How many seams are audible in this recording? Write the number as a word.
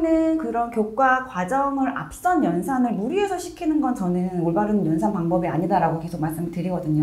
zero